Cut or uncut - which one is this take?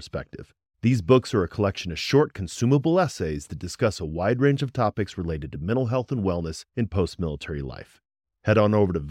uncut